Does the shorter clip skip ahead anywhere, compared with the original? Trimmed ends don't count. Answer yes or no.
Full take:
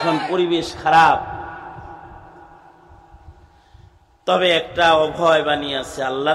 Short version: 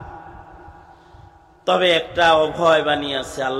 yes